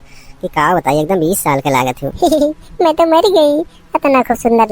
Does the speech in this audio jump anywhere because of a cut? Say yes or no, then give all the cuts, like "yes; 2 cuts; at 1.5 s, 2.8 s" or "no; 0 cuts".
yes; 1 cut; at 2.1 s